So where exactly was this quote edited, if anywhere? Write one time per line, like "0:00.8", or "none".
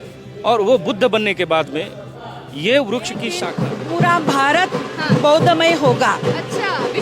0:03.4